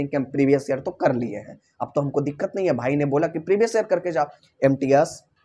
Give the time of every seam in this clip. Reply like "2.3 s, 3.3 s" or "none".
4.4 s